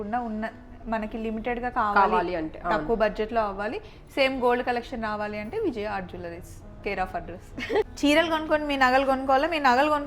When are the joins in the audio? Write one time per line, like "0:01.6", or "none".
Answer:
0:07.9